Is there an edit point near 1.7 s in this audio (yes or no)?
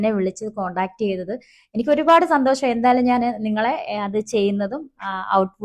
yes